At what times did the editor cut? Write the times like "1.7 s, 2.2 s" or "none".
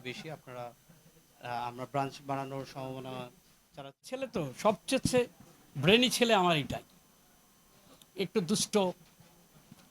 4.3 s